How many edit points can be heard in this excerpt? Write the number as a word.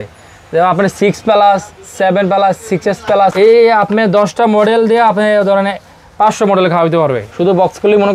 two